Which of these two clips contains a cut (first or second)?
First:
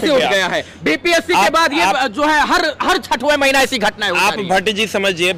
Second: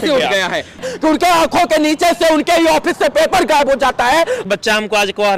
second